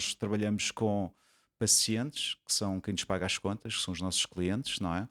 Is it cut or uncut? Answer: uncut